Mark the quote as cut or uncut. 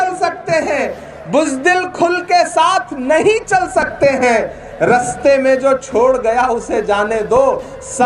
uncut